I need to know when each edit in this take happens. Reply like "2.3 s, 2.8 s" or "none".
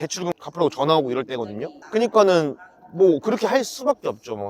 none